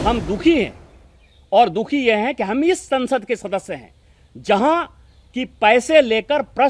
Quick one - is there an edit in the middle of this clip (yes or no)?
no